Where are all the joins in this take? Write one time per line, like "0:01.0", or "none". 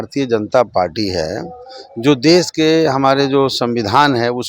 none